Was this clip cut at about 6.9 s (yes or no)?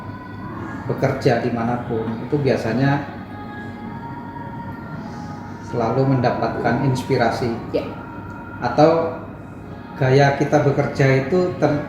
no